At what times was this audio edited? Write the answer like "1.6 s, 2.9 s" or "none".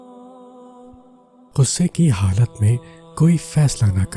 1.5 s